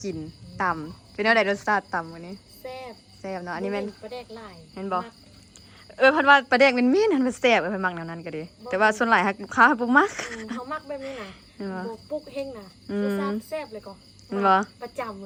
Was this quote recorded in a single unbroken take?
yes; 0 cuts

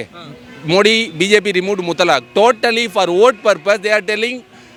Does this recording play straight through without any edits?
yes; 0 cuts

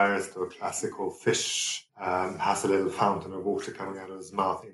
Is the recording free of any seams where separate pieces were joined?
no; 1 cut; at 1.8 s

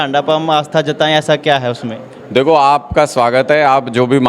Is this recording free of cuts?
yes; 0 cuts

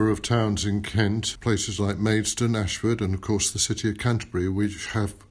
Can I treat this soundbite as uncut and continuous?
no; 1 cut; at 1.3 s

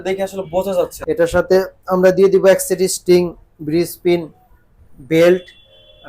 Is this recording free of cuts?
no; 1 cut; at 1.0 s

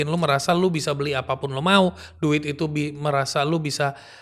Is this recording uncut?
yes; 0 cuts

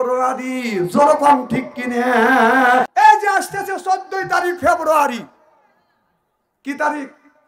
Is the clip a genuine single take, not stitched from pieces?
no; 1 cut; at 2.9 s

